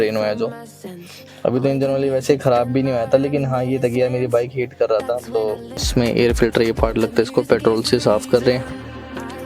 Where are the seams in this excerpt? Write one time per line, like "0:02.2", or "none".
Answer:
0:05.8